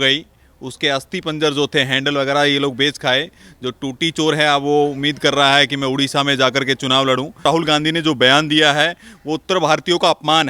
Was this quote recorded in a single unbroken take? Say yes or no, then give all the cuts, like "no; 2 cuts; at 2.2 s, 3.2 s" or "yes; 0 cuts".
no; 1 cut; at 7.5 s